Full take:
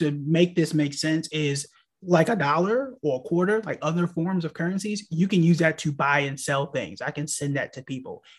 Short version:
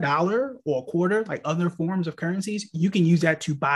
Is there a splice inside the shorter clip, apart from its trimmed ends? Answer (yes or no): no